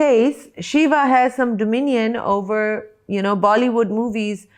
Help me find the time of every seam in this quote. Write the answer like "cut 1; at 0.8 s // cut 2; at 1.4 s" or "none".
none